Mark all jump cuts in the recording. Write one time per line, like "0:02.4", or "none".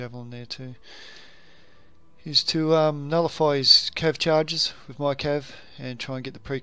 none